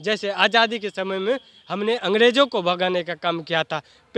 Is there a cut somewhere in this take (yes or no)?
no